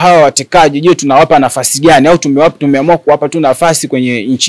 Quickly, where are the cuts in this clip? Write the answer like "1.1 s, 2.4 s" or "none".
none